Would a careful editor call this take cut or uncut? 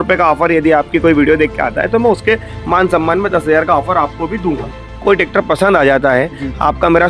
cut